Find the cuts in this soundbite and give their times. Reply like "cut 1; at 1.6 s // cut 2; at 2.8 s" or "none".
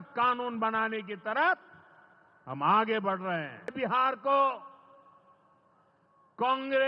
cut 1; at 3.7 s

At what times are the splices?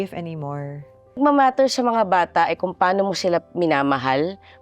cut 1; at 1.2 s

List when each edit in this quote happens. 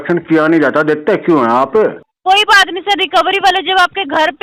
cut 1; at 2.1 s

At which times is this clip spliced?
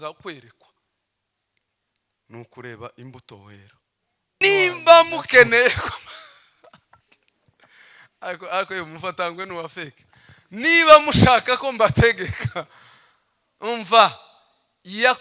cut 1; at 4.4 s

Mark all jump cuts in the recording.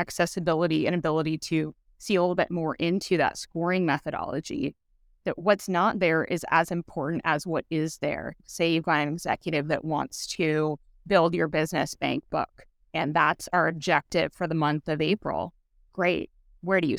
cut 1; at 8.4 s

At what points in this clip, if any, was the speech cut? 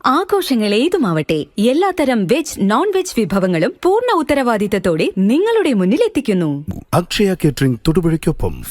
cut 1; at 6.6 s

